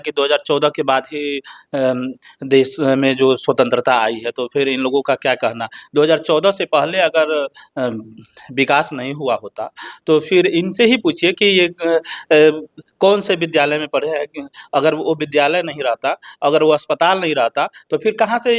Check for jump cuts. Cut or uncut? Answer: uncut